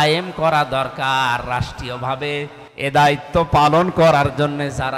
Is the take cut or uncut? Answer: cut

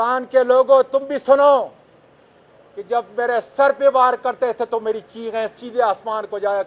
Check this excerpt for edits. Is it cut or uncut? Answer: uncut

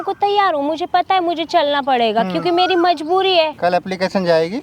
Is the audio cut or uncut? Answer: cut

